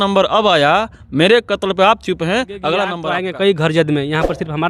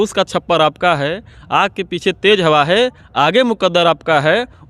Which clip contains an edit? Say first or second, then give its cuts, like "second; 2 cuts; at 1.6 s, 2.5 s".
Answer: first; 1 cut; at 3.0 s